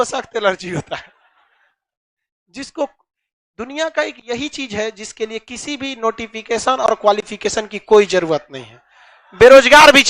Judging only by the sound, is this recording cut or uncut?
uncut